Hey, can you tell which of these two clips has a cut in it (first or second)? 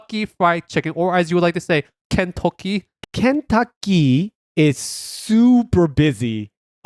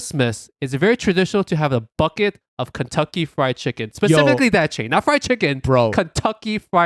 first